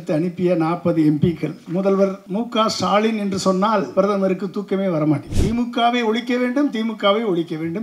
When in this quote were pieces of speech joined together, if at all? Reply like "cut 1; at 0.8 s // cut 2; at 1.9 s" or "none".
cut 1; at 1.6 s // cut 2; at 2.2 s // cut 3; at 3.9 s // cut 4; at 5.3 s